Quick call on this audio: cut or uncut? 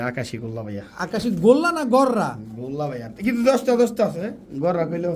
uncut